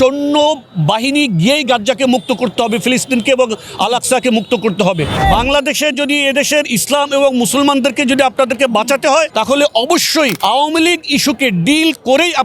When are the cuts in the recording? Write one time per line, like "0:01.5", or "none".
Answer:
0:05.2
0:09.3
0:10.4